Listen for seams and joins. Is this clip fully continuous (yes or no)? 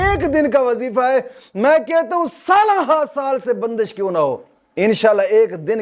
yes